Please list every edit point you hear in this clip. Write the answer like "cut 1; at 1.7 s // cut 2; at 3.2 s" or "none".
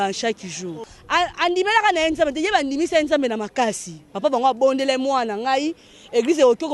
cut 1; at 0.9 s